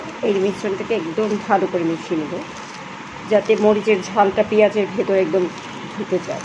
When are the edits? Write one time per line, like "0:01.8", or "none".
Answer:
none